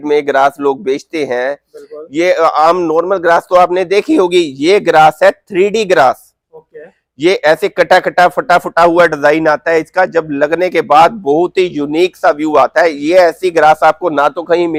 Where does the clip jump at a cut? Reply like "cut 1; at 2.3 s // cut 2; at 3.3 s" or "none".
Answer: none